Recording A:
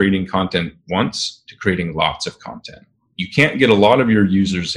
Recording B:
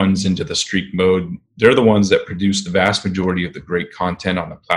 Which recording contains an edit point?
A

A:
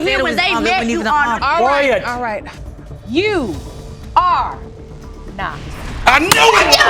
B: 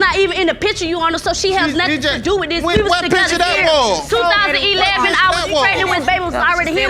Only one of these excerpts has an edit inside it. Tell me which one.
A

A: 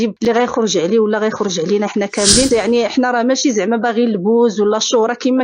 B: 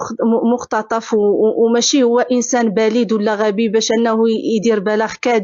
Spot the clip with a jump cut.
A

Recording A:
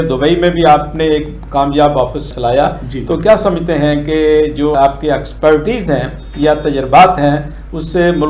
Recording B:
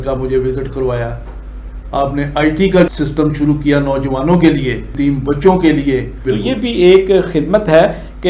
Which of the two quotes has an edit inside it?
B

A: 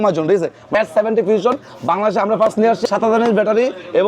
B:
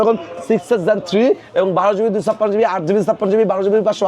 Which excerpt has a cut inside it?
A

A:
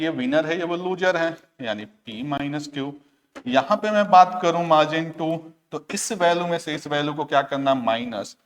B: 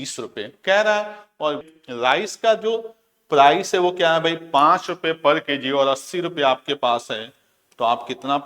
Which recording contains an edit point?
B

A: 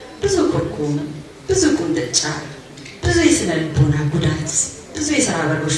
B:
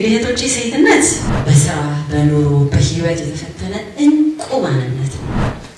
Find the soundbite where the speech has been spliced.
B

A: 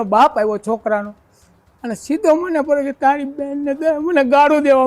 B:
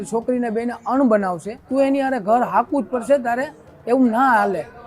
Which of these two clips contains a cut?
B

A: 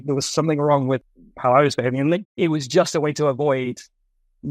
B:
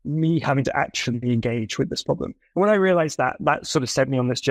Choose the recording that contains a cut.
A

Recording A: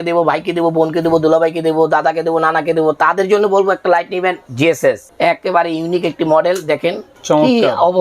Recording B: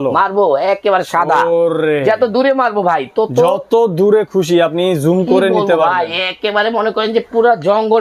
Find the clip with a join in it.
A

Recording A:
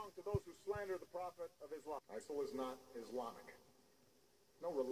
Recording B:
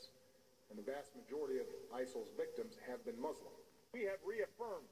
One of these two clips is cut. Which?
A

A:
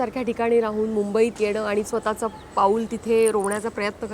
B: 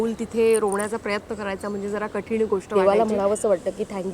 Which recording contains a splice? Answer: B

